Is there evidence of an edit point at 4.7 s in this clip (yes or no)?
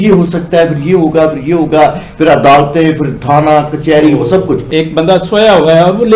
yes